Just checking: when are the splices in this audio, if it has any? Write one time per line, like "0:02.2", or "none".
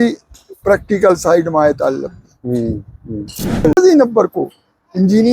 0:03.8

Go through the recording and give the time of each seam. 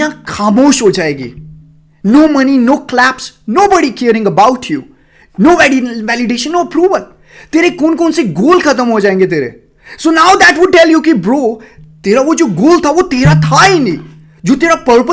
none

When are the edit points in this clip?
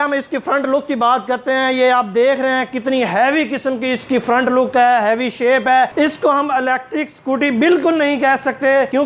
none

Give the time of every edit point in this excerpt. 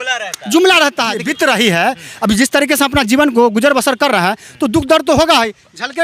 0:01.2

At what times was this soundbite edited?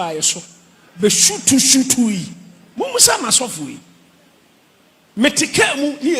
none

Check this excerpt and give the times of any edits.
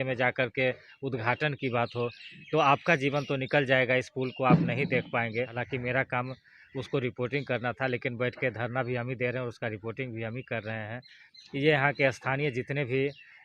0:05.6

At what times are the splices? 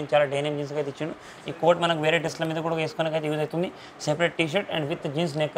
0:01.3

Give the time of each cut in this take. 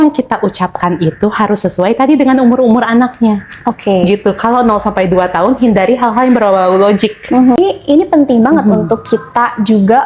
0:07.6

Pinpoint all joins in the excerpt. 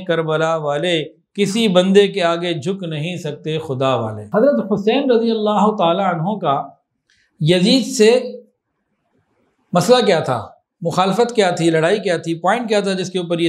0:04.2

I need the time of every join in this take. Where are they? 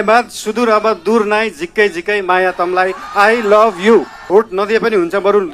0:04.2

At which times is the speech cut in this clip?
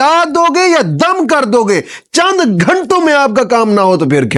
none

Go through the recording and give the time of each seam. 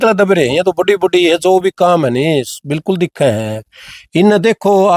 none

